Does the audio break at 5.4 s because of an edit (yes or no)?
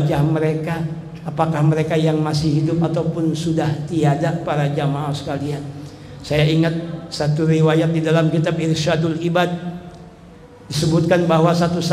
no